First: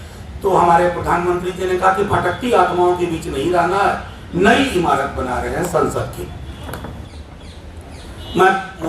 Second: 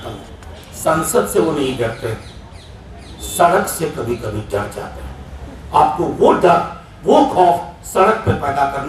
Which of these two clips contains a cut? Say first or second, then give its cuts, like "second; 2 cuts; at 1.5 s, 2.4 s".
first; 1 cut; at 7.0 s